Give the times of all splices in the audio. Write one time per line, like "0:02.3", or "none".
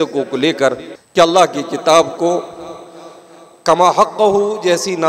0:00.9